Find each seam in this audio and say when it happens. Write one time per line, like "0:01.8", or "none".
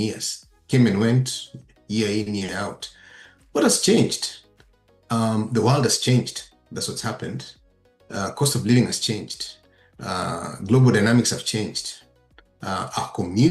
none